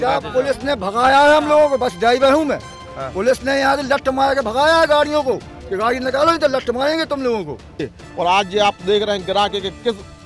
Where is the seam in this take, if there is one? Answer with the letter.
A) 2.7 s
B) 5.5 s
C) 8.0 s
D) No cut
C